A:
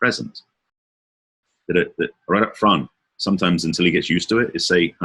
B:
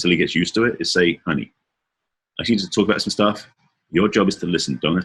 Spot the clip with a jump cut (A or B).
A